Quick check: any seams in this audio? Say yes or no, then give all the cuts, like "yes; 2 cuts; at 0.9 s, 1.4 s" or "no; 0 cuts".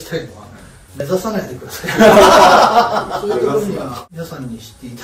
yes; 1 cut; at 4.0 s